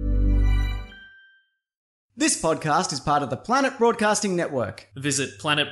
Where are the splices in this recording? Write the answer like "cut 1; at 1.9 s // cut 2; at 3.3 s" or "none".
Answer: cut 1; at 2.1 s